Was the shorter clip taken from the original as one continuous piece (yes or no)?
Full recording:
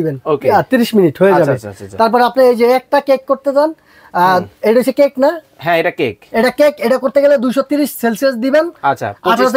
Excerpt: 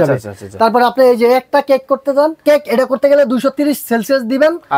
no